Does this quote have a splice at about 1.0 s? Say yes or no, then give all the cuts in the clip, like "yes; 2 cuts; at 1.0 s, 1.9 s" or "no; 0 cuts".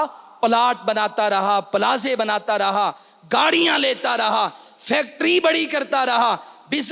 no; 0 cuts